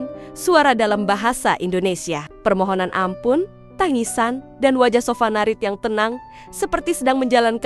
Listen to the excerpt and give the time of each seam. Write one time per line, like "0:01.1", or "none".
none